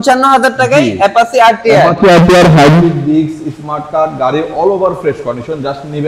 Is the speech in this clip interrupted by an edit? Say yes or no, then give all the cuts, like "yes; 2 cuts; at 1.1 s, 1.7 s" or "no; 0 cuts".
no; 0 cuts